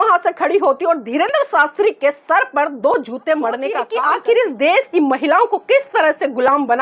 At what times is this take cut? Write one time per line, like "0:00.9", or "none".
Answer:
0:03.9